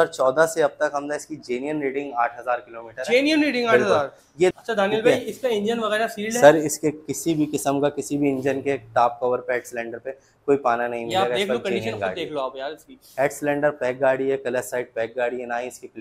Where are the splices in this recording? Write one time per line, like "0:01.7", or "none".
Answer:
0:04.5